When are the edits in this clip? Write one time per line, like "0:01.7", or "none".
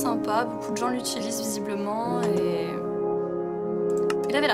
0:01.9